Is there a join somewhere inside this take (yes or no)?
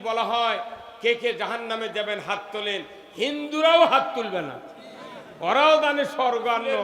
no